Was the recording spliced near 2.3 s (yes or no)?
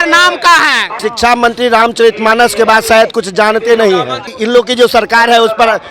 no